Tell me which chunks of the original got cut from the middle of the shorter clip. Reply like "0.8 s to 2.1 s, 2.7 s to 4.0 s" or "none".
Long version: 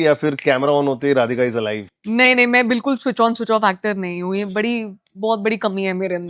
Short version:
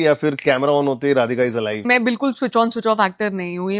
1.9 s to 2.5 s